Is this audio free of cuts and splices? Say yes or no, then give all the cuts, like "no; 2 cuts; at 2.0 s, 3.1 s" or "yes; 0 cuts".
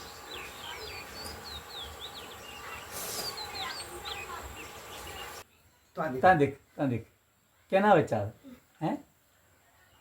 no; 1 cut; at 5.4 s